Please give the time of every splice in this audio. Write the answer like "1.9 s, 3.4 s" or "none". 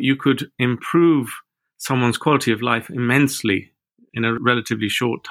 4.3 s